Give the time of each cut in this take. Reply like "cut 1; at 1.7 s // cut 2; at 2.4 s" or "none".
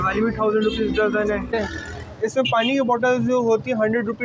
cut 1; at 1.5 s